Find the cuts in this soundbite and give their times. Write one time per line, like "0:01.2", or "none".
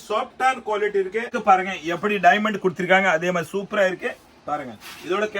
0:01.3